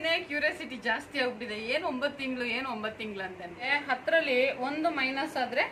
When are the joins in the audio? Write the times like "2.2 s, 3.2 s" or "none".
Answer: 3.7 s

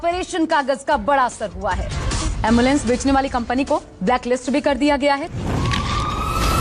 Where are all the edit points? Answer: 1.7 s

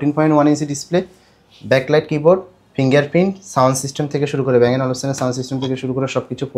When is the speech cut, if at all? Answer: none

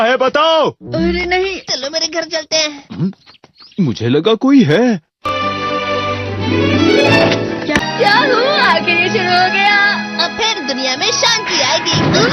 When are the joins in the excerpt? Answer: 7.8 s

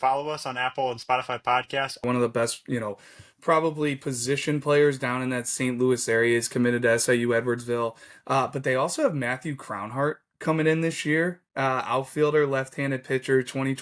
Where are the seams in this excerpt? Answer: 2.0 s

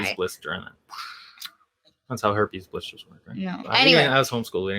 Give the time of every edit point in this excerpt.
3.6 s

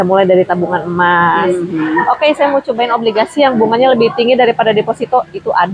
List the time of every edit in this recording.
none

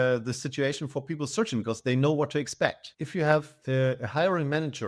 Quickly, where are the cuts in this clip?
2.9 s

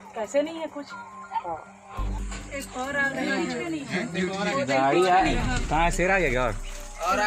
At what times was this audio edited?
2.2 s

